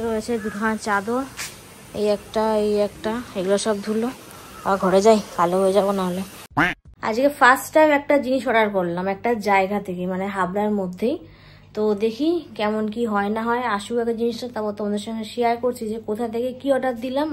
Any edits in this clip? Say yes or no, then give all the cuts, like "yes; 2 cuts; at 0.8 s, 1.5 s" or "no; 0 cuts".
yes; 1 cut; at 6.6 s